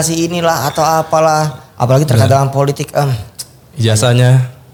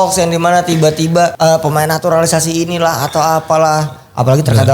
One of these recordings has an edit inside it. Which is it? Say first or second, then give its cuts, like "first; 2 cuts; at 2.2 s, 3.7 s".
second; 1 cut; at 1.3 s